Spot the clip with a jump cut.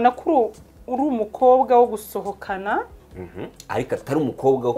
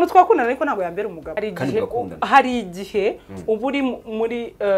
second; 1 cut; at 1.2 s

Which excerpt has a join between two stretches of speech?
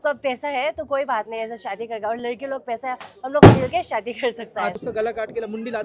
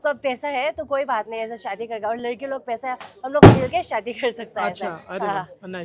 first; 1 cut; at 4.8 s

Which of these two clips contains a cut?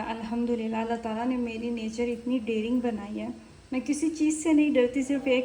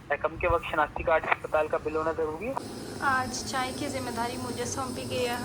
second; 1 cut; at 2.6 s

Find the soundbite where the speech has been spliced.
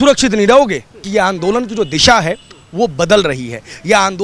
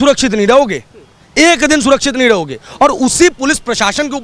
first; 1 cut; at 1.1 s

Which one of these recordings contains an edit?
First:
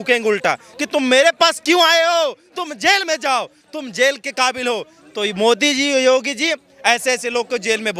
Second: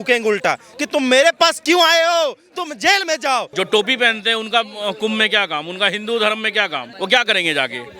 second; 2 cuts; at 3.5 s, 6.8 s

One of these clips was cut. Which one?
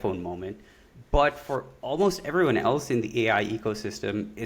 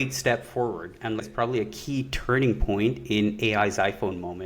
second; 1 cut; at 1.2 s

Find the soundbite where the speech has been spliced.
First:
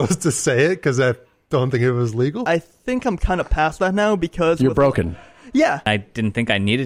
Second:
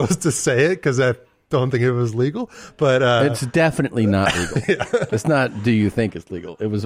first; 2 cuts; at 2.5 s, 5.9 s

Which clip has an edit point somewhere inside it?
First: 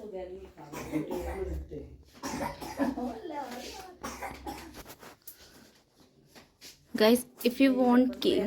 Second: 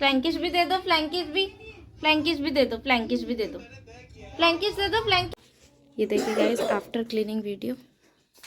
second; 1 cut; at 5.3 s

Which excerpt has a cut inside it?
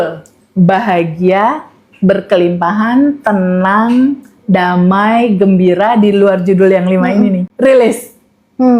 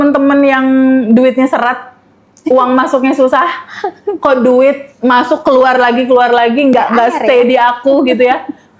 first; 1 cut; at 7.5 s

